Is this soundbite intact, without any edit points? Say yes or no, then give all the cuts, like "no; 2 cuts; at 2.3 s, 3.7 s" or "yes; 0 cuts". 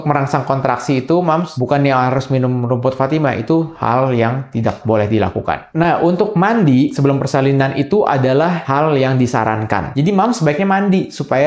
no; 3 cuts; at 5.6 s, 6.9 s, 8.6 s